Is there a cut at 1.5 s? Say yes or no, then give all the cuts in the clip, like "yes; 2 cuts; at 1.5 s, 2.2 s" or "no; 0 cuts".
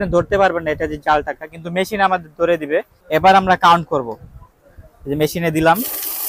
no; 1 cut; at 3.0 s